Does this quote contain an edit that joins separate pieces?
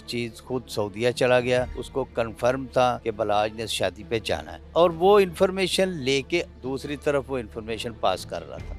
yes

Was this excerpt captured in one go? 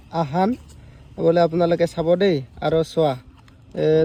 yes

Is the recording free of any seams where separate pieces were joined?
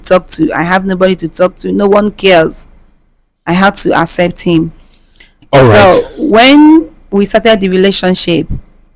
yes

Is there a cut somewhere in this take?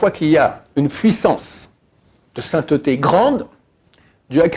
no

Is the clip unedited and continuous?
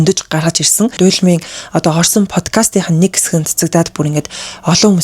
no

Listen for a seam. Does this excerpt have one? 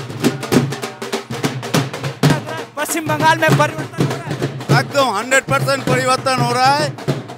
yes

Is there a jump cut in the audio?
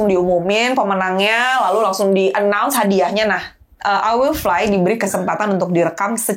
no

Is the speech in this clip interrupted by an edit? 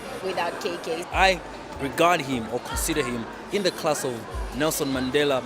yes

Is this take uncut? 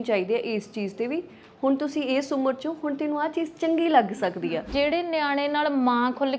no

